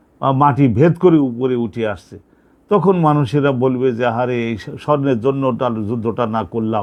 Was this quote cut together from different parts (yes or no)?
no